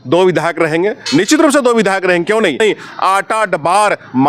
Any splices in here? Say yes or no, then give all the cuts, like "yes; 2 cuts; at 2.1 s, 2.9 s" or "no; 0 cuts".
yes; 1 cut; at 2.6 s